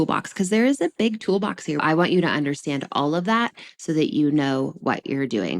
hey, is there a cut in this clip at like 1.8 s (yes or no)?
yes